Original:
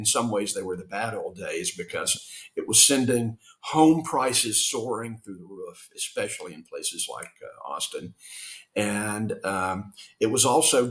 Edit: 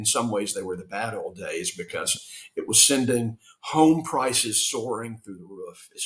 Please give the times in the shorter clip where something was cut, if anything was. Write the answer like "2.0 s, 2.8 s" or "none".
none